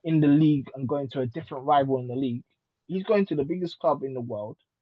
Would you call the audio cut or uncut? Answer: uncut